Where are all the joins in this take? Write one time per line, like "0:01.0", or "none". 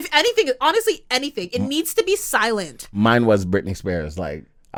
none